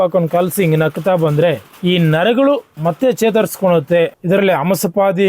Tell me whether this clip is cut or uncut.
cut